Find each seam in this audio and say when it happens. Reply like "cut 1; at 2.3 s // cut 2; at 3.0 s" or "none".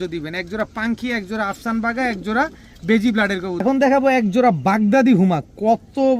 cut 1; at 3.6 s